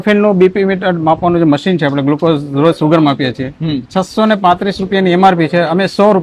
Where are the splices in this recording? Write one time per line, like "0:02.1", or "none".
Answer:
none